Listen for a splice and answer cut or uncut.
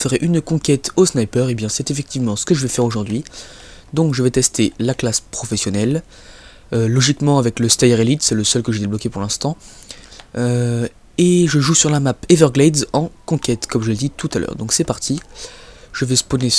uncut